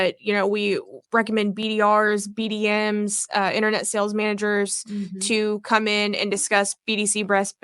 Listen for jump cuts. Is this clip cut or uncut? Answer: cut